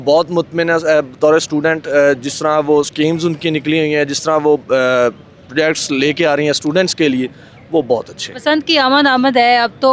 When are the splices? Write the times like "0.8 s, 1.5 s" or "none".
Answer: none